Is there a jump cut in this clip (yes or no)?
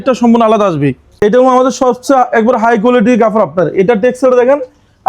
yes